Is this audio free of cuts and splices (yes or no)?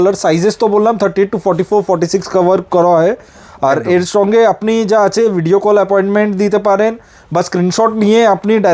yes